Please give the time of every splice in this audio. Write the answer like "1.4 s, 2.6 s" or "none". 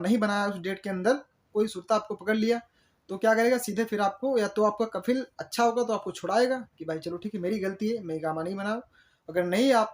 1.4 s